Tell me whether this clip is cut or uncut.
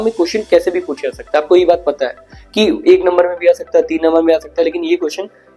uncut